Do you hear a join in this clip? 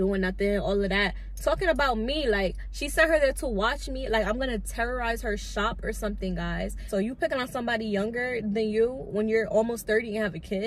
yes; 1 cut; at 6.8 s

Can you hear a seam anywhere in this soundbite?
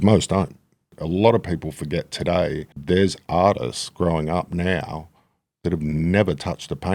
yes; 2 cuts; at 1.0 s, 2.7 s

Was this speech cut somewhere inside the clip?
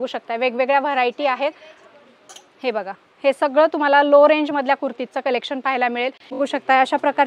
yes; 1 cut; at 6.4 s

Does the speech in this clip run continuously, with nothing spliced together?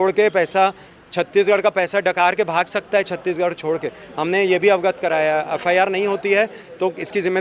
yes; 0 cuts

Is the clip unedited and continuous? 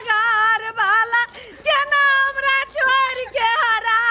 yes; 0 cuts

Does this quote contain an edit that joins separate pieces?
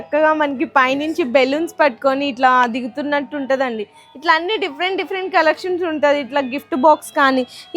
no; 0 cuts

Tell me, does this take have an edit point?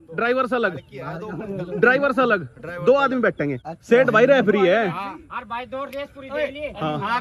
no; 0 cuts

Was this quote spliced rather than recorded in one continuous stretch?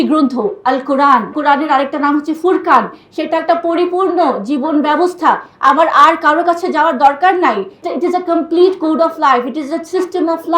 yes; 2 cuts; at 1.3 s, 7.8 s

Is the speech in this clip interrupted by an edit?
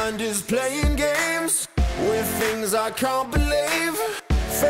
no; 0 cuts

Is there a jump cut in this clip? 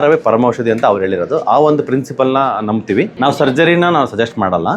yes; 1 cut; at 3.1 s

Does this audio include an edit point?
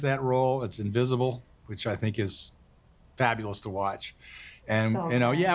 no; 0 cuts

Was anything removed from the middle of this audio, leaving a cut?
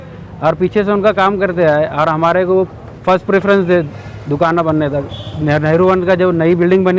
no; 0 cuts

